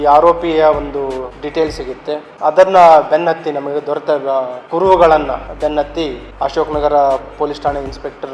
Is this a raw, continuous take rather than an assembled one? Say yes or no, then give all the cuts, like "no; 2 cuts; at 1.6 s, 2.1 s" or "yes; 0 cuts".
no; 5 cuts; at 1.3 s, 2.3 s, 4.6 s, 5.5 s, 6.2 s